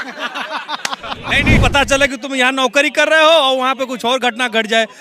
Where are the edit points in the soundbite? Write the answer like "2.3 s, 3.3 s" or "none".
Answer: 1.6 s